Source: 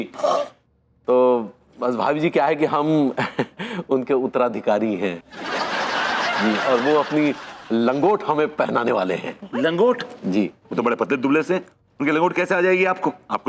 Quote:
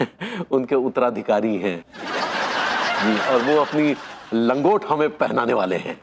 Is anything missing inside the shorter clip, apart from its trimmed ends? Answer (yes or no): no